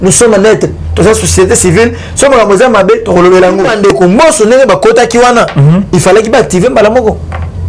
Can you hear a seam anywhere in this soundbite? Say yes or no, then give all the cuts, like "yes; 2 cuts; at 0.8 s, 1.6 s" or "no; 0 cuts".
yes; 1 cut; at 3.7 s